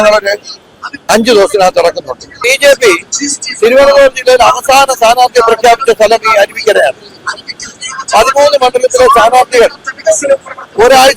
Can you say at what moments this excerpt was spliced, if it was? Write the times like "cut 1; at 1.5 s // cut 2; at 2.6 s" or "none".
cut 1; at 2.4 s

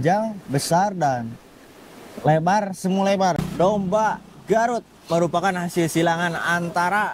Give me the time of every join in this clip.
cut 1; at 3.4 s

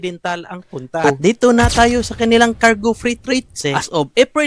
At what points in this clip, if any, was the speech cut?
cut 1; at 1.0 s // cut 2; at 3.6 s

